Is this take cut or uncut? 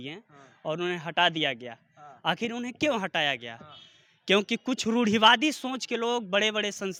uncut